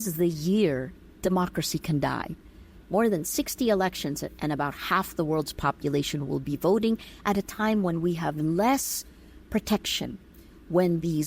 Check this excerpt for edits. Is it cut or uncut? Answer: cut